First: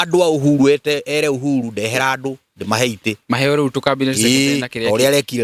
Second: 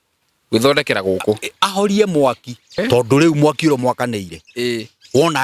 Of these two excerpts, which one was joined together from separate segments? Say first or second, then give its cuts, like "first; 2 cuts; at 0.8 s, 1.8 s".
second; 1 cut; at 2.8 s